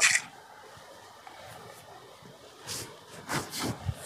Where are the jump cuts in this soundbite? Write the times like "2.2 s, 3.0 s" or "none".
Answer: none